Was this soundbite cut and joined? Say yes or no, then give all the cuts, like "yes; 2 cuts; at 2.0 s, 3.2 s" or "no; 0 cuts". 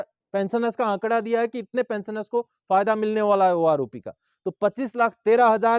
no; 0 cuts